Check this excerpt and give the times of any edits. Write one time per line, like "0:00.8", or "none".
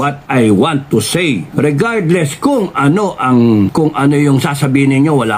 0:01.5
0:03.7